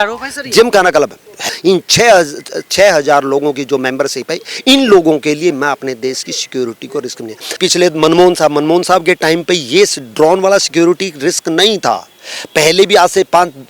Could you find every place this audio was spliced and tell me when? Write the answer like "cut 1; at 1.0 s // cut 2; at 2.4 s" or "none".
cut 1; at 1.5 s // cut 2; at 7.6 s